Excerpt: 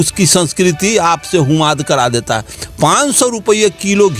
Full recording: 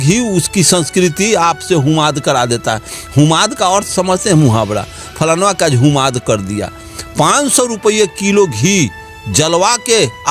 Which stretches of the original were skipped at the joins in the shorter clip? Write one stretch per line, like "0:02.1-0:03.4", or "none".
0:02.9-0:06.9